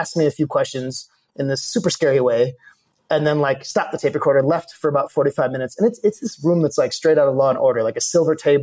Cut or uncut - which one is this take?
uncut